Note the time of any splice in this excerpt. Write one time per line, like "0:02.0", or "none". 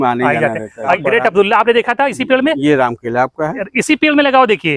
0:01.0